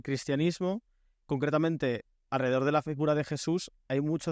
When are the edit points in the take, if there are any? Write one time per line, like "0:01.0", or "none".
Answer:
none